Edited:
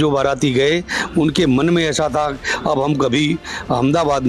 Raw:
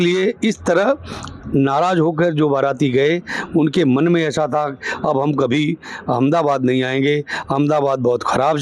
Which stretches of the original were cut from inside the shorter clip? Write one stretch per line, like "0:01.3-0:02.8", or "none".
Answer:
none